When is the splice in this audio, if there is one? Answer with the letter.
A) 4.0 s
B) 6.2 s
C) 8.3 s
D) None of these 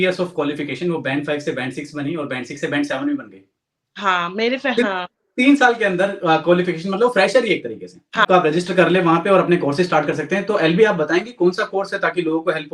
C